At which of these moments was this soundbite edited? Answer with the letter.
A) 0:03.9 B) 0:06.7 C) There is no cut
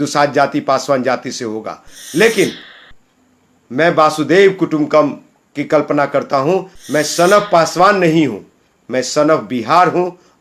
B